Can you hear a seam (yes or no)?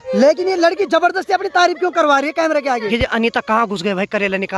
yes